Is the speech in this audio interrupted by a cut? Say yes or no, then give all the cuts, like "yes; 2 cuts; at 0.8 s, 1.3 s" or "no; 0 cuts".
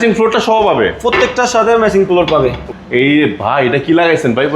yes; 1 cut; at 2.7 s